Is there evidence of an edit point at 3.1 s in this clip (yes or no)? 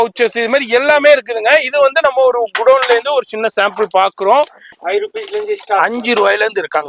no